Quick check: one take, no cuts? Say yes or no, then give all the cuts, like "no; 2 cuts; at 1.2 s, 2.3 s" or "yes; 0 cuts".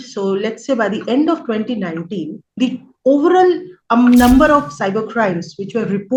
no; 2 cuts; at 2.4 s, 3.7 s